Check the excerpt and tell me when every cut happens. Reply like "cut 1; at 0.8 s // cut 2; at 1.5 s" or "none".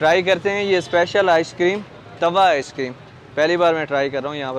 none